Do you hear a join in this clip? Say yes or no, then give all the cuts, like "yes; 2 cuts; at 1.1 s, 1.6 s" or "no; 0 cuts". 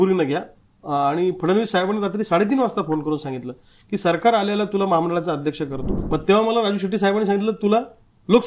yes; 1 cut; at 5.9 s